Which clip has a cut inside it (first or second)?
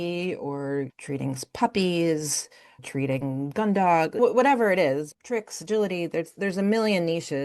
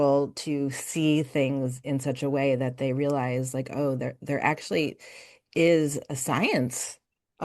first